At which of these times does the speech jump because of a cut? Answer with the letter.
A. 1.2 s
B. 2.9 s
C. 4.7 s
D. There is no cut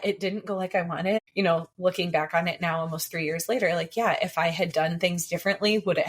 A